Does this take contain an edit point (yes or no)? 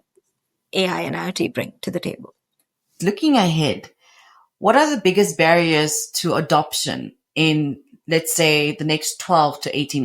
yes